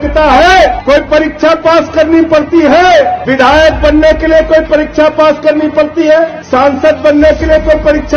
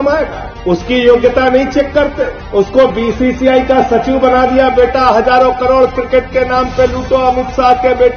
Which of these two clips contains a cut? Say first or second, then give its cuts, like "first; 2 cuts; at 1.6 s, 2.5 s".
first; 3 cuts; at 0.8 s, 3.2 s, 6.4 s